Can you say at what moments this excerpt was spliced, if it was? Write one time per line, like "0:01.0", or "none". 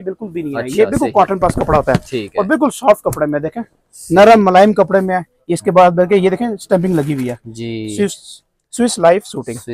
none